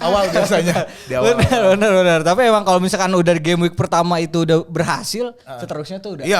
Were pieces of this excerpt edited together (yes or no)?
no